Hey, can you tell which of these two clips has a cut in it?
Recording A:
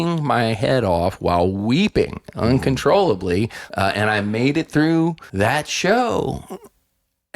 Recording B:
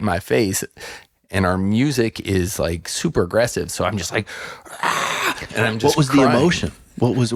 A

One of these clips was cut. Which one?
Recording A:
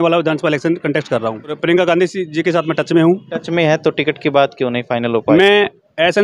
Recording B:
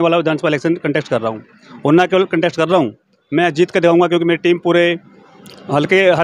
A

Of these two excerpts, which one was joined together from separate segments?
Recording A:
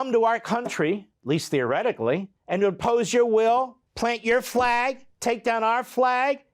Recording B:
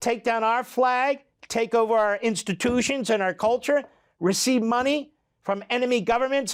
A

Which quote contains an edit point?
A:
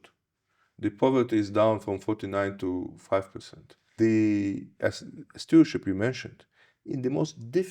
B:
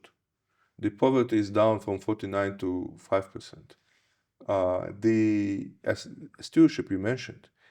A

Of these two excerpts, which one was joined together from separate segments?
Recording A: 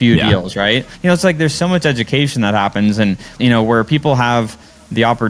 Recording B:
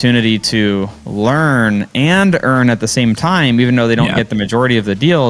A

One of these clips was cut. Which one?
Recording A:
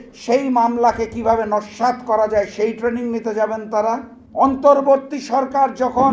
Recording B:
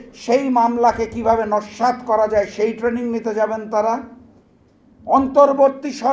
A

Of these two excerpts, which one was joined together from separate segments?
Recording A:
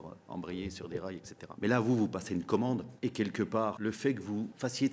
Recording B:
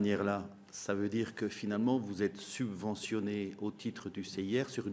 A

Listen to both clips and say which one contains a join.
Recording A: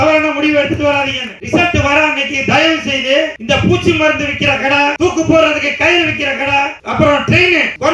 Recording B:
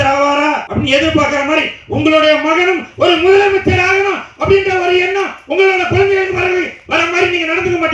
A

